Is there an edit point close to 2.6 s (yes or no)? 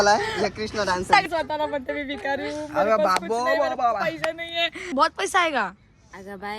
no